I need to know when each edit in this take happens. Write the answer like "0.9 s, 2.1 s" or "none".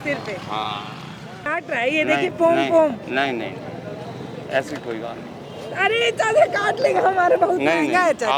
1.5 s